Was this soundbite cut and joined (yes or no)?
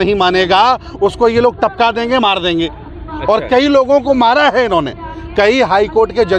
no